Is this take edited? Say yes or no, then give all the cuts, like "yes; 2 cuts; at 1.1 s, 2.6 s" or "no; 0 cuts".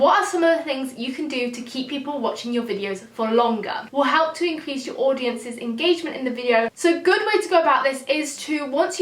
yes; 2 cuts; at 3.9 s, 6.7 s